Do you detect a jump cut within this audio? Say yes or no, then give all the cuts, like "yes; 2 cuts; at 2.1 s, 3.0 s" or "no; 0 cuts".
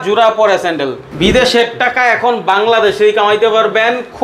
yes; 1 cut; at 1.0 s